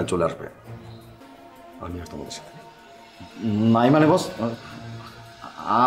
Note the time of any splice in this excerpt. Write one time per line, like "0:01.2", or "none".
0:01.2

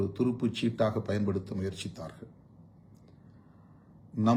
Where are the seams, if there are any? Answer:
none

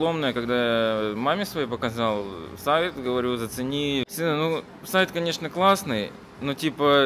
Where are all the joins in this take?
0:04.1

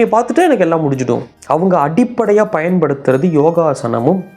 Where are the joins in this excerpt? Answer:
0:01.3

